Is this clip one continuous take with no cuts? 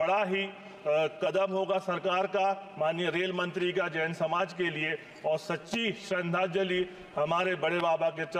yes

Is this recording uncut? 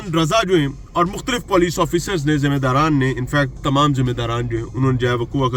yes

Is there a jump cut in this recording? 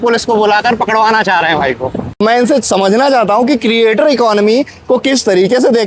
yes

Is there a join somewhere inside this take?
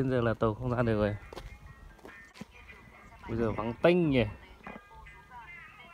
yes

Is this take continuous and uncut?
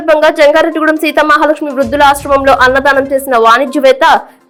yes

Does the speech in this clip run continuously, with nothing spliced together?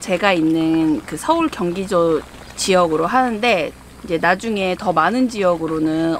yes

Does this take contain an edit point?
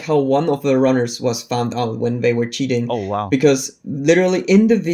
no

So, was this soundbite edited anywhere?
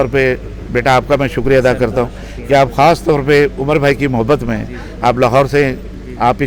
no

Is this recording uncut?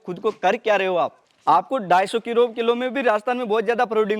no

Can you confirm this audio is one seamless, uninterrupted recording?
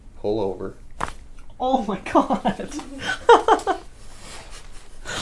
yes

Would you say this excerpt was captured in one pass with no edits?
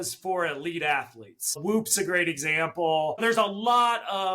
no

